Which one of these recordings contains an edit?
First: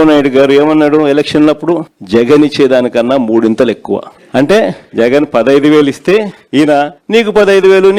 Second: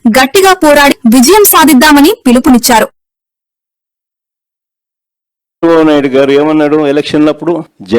second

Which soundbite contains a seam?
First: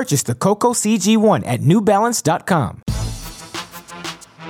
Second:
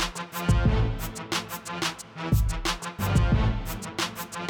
first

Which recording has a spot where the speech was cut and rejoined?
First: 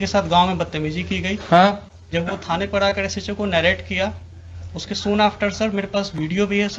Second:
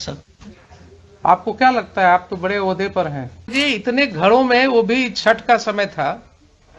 second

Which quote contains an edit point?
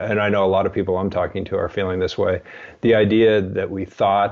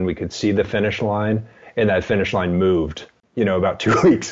second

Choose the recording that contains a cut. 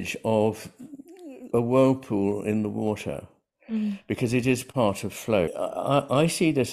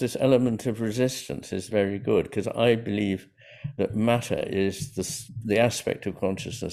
first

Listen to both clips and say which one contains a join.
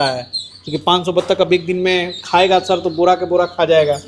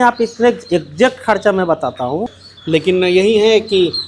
second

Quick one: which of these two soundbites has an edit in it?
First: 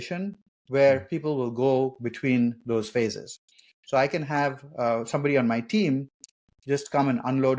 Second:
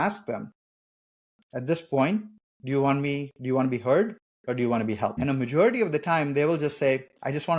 second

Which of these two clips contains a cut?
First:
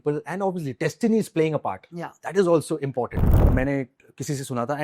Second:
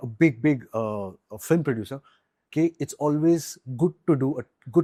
first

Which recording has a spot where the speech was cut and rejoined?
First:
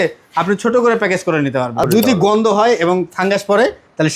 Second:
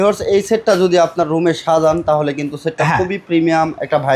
first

